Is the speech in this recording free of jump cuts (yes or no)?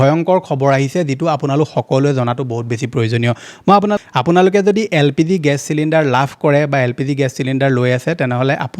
no